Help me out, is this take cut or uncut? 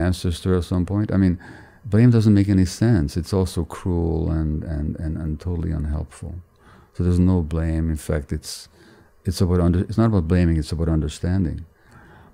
uncut